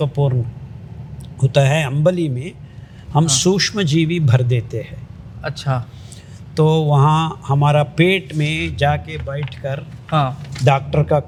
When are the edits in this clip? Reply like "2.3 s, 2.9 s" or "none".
none